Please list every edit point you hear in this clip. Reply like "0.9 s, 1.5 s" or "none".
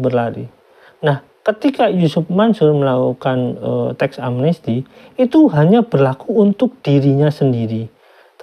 none